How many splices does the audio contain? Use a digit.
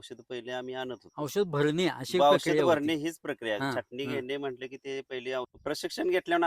1